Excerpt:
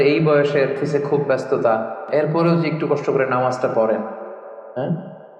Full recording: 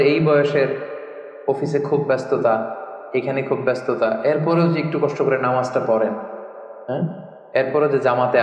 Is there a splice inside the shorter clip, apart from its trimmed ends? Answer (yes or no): yes